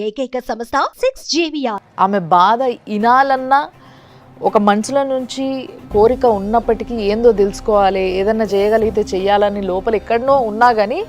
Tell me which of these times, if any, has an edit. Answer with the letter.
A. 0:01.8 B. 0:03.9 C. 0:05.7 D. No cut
A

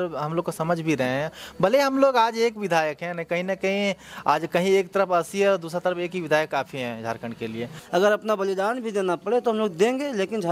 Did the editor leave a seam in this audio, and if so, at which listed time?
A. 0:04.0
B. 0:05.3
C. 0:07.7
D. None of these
C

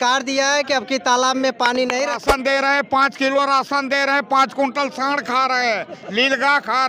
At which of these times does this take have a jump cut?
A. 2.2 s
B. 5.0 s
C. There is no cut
A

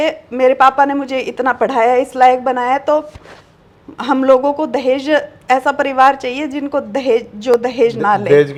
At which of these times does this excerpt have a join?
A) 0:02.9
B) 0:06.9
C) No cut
C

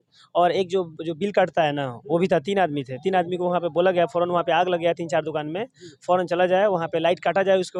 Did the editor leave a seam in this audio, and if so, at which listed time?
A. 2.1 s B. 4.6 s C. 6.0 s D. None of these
D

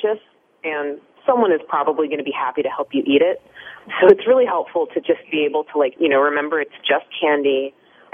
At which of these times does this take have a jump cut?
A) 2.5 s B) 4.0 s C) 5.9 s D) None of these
C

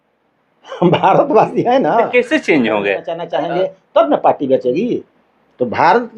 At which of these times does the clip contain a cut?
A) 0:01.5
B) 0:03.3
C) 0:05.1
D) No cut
B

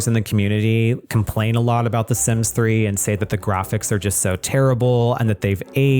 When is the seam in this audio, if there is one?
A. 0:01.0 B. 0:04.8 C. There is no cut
C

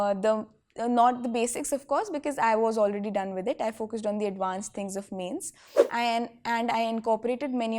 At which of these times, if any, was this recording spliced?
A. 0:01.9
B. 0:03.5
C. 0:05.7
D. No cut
C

